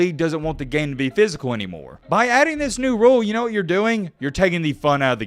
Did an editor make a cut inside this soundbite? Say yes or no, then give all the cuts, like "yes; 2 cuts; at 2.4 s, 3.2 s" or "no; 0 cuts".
yes; 1 cut; at 1.9 s